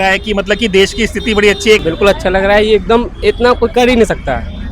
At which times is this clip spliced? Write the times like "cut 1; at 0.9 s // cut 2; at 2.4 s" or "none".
cut 1; at 1.8 s